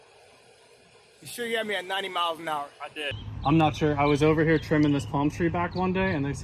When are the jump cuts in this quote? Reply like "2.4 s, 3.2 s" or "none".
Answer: 3.2 s